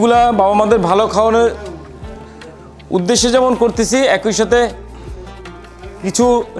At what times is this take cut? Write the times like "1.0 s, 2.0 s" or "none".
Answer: none